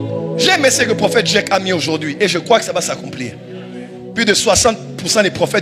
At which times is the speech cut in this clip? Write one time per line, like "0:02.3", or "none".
none